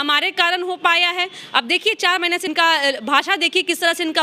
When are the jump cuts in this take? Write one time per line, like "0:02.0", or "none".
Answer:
0:02.5